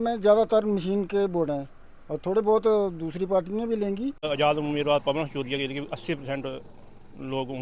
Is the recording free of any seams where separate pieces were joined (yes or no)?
no